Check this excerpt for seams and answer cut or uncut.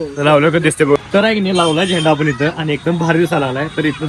cut